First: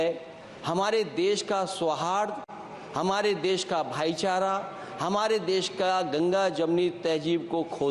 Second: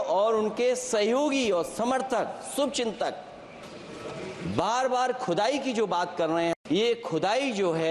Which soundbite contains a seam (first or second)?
second